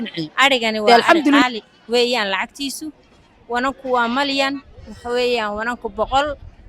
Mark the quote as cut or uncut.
cut